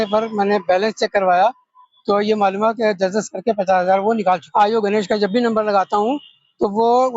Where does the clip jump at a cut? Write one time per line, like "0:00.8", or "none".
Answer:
0:04.4